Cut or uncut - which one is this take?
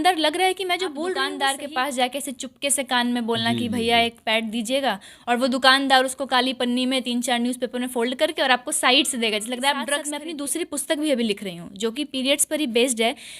cut